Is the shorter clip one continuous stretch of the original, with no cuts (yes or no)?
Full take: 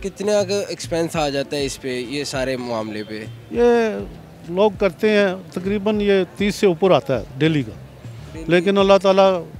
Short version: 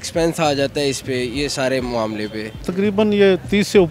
no